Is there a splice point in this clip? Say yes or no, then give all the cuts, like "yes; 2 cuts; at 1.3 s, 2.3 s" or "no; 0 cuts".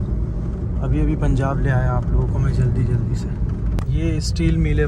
yes; 1 cut; at 3.8 s